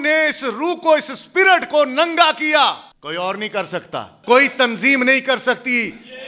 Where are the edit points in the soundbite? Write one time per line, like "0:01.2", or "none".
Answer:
0:02.9
0:04.1